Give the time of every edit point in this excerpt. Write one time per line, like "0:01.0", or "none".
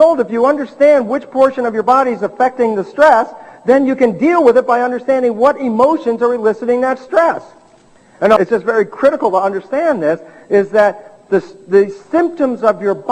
0:06.2